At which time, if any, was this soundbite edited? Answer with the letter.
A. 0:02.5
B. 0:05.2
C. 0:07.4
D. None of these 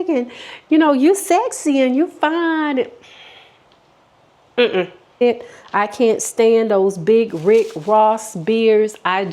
B